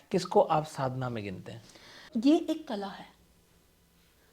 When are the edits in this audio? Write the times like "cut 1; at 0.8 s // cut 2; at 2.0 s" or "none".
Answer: cut 1; at 2.1 s